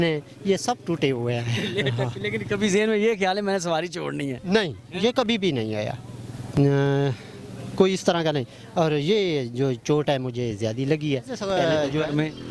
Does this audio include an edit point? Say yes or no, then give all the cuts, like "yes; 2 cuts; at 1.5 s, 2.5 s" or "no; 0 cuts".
yes; 1 cut; at 11.3 s